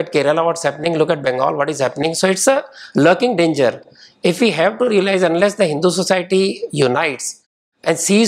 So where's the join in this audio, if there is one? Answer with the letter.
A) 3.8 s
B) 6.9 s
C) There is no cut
C